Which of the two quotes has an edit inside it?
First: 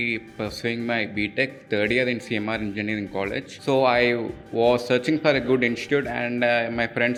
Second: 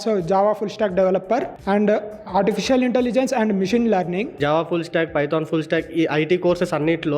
second; 2 cuts; at 1.5 s, 4.3 s

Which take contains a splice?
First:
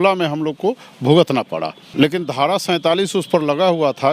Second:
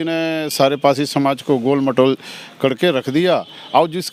first; 1 cut; at 1.8 s

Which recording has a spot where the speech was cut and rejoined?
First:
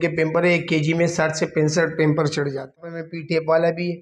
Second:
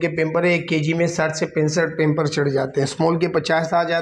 first; 1 cut; at 2.9 s

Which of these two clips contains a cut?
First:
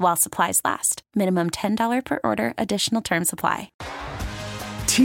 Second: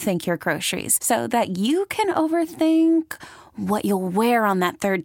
first; 1 cut; at 3.8 s

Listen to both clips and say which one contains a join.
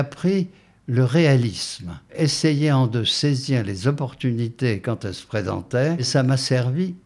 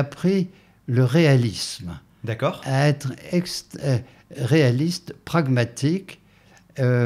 first; 2 cuts; at 2.1 s, 6.1 s

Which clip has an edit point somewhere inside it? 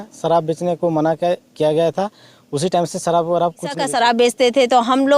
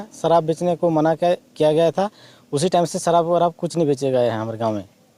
first; 1 cut; at 3.8 s

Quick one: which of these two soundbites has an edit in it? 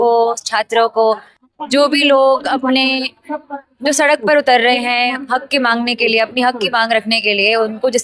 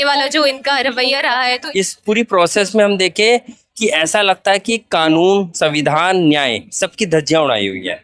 second; 1 cut; at 1.6 s

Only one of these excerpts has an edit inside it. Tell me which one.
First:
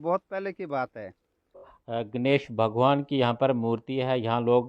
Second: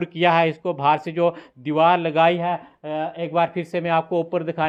first; 1 cut; at 1.8 s

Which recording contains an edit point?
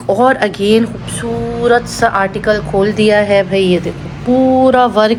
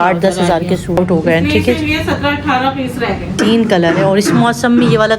second; 2 cuts; at 1.0 s, 3.3 s

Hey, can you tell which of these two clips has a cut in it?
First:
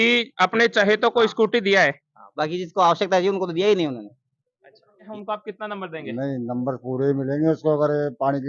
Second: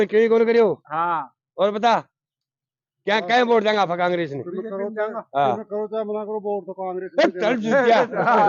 first; 1 cut; at 5.0 s

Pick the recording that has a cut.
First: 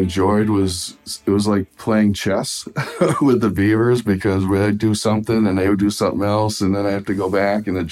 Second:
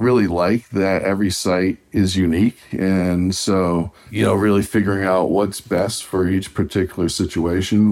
second; 1 cut; at 4.0 s

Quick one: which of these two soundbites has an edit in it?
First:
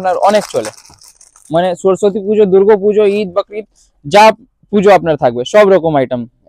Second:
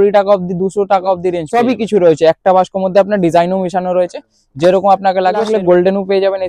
second; 2 cuts; at 1.4 s, 5.5 s

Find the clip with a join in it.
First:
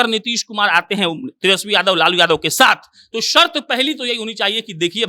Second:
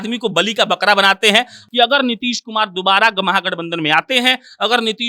second; 1 cut; at 1.6 s

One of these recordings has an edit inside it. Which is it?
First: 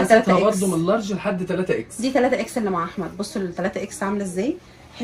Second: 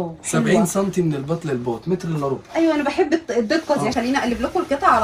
second; 1 cut; at 3.9 s

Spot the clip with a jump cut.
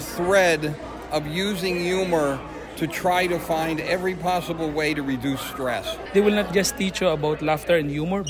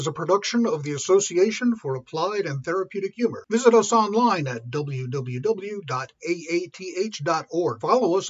first; 1 cut; at 6.0 s

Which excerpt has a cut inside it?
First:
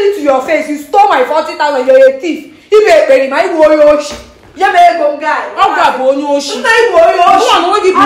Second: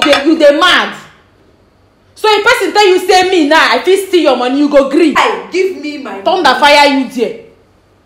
second; 1 cut; at 5.2 s

